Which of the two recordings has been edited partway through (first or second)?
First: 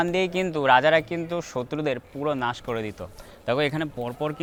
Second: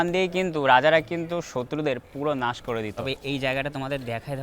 second